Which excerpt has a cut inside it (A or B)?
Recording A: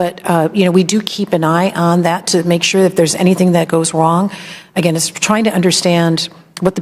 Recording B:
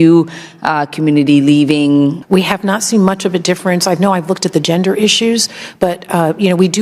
B